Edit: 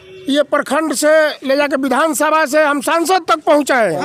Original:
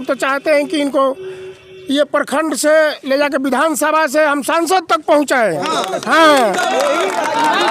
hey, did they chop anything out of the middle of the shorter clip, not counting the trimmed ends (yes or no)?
no